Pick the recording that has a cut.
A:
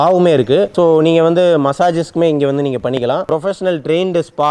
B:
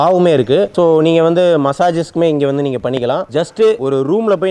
B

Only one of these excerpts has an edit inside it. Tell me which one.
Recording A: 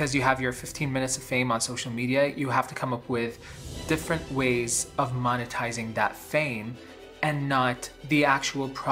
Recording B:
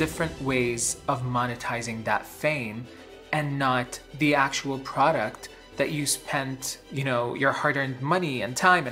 B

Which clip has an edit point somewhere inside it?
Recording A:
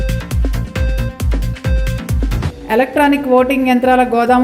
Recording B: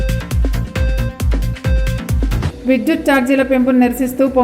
A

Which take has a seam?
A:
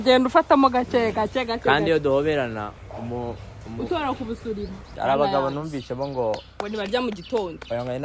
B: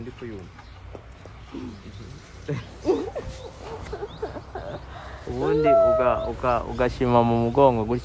A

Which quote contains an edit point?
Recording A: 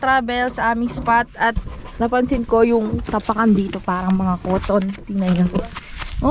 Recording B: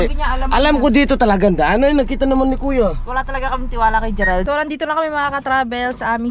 B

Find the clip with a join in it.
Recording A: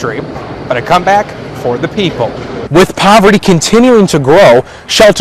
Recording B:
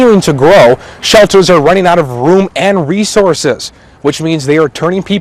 A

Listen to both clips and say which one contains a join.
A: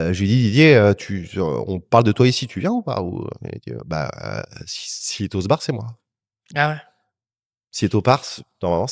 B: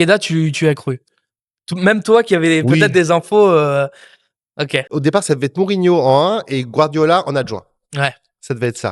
B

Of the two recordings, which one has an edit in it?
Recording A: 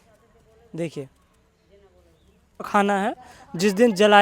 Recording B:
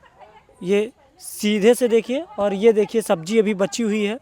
A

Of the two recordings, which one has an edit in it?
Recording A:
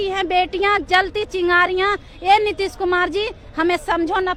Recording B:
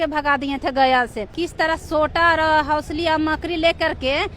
B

